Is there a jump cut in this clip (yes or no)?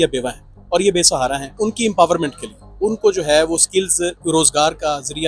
yes